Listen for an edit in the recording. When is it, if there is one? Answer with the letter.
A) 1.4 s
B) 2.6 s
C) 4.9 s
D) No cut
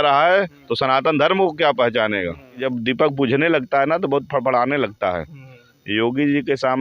B